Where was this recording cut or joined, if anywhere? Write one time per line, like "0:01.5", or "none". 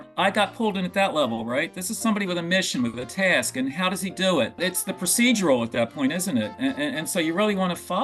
none